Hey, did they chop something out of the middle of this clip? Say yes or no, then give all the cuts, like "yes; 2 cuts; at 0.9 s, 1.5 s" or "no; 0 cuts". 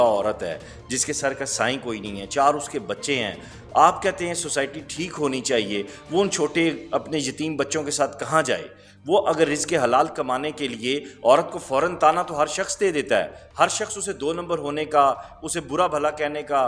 no; 0 cuts